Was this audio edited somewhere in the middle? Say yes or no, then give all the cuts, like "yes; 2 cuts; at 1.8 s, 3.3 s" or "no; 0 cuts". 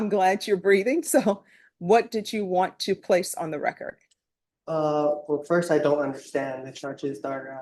no; 0 cuts